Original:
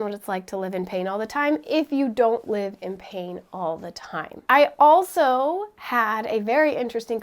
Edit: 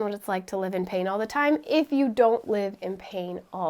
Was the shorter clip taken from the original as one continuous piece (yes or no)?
yes